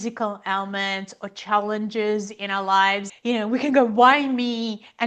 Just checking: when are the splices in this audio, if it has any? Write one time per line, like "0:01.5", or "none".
none